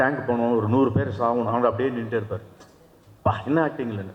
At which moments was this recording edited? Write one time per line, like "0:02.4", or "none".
none